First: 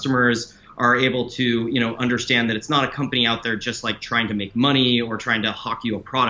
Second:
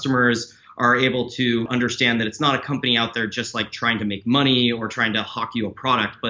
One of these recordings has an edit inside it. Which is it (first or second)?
second